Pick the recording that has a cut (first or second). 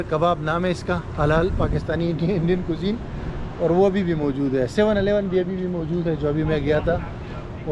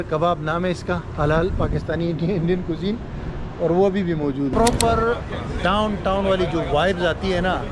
second